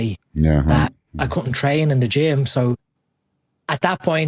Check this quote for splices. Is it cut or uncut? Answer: uncut